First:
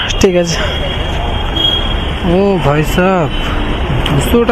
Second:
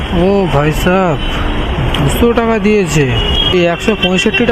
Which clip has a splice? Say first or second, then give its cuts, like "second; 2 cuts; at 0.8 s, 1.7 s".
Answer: second; 1 cut; at 3.5 s